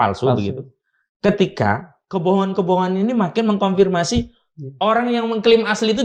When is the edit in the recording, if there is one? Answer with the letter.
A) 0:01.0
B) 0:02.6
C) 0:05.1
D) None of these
D